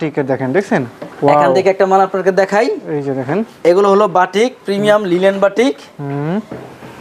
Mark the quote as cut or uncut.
uncut